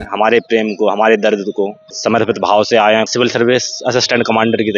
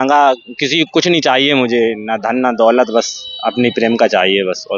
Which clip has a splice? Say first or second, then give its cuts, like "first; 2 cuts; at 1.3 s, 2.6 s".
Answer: first; 2 cuts; at 1.8 s, 3.1 s